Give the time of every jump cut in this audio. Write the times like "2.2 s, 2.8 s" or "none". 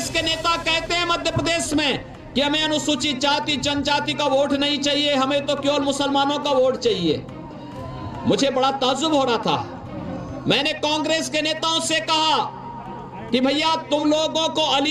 none